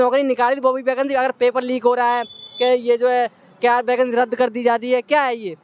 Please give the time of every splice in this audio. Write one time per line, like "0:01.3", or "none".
none